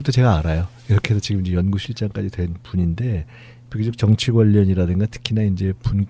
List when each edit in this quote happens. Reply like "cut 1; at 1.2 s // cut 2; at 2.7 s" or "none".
cut 1; at 2.8 s